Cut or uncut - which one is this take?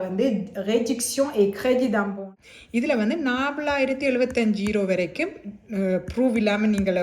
cut